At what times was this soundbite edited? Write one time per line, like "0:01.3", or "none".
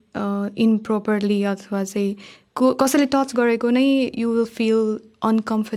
none